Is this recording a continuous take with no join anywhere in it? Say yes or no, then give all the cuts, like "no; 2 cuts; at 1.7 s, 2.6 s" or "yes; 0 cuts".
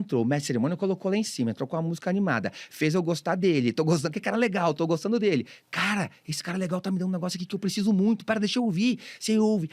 yes; 0 cuts